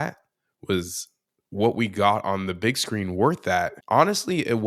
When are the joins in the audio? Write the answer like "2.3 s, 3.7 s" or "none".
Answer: 3.8 s